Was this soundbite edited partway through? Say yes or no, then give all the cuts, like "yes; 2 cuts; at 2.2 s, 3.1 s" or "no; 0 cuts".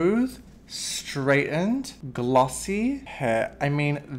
yes; 2 cuts; at 2.0 s, 3.1 s